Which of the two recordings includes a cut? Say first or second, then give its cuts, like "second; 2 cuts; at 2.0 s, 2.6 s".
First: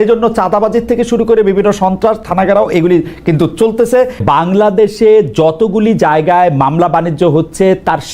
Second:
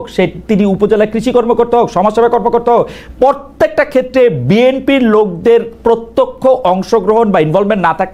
first; 1 cut; at 4.2 s